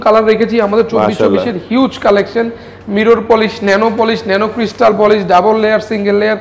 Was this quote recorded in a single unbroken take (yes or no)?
yes